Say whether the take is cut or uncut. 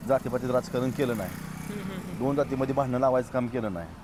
uncut